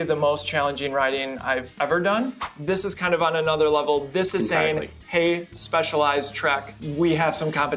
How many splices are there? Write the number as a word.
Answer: three